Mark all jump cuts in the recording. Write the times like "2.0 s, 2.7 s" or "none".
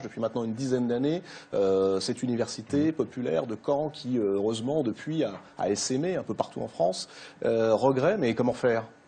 2.2 s